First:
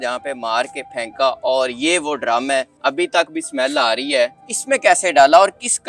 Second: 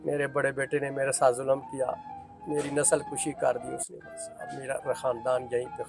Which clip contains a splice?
first; 2 cuts; at 2.7 s, 4.5 s

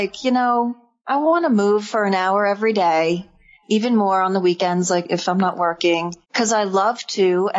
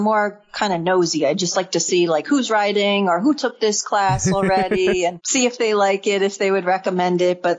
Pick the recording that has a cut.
first; 1 cut; at 5.0 s

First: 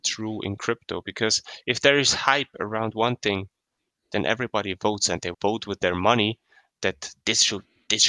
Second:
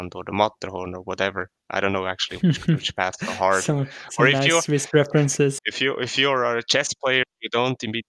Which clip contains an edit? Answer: second; 1 cut; at 5.7 s

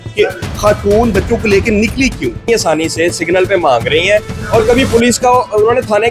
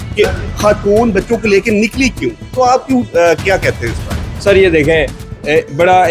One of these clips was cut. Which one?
first; 1 cut; at 2.4 s

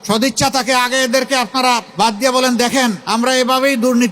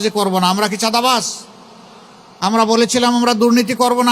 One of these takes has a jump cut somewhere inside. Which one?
first; 2 cuts; at 1.9 s, 3.0 s

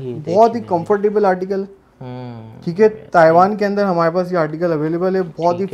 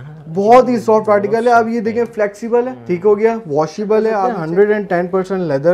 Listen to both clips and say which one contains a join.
second; 2 cuts; at 2.8 s, 4.3 s

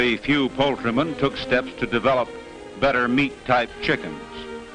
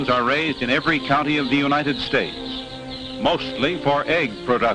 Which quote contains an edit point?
second; 1 cut; at 2.8 s

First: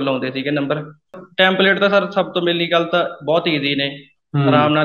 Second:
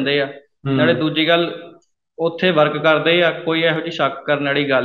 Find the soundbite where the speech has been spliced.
first; 1 cut; at 1.2 s

